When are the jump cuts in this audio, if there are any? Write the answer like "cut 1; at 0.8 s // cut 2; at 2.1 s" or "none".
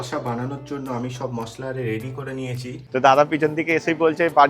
cut 1; at 2.8 s